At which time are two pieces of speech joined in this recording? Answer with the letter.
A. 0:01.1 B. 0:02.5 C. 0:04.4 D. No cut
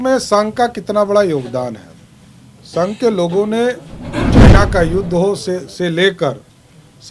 C